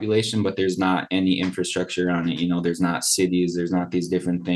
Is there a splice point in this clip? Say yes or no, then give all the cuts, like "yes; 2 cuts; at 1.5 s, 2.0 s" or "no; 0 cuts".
no; 0 cuts